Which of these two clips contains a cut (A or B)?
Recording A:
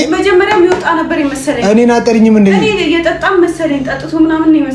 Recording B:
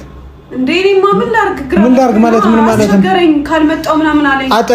B